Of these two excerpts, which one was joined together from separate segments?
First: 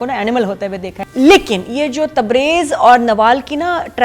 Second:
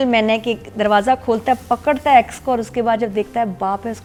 first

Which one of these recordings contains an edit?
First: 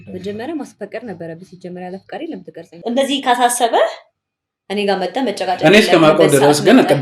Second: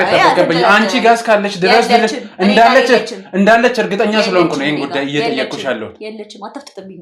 first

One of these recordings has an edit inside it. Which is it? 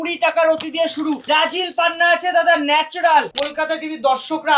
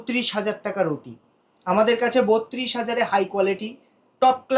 first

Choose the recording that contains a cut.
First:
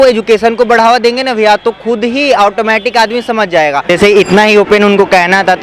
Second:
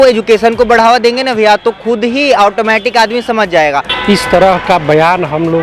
second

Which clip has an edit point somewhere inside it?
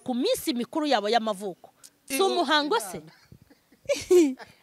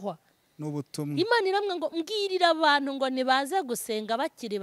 first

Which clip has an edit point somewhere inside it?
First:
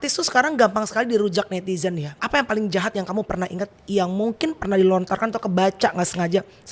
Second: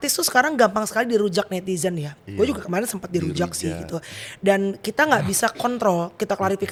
first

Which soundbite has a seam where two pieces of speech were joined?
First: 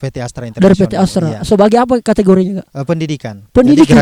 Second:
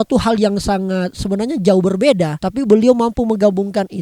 second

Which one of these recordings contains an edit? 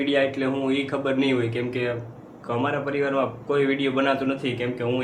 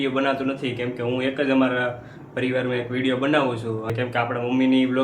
second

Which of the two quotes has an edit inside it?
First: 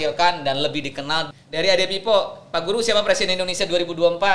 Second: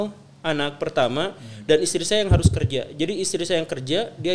first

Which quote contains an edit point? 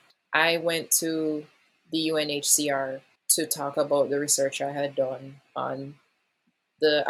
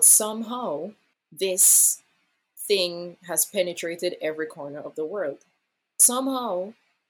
second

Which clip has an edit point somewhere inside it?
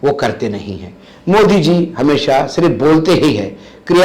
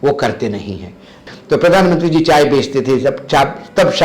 second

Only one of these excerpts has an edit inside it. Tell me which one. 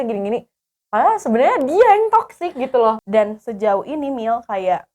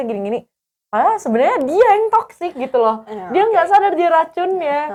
first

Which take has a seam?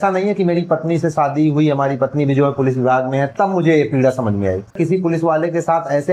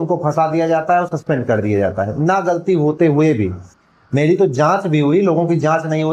first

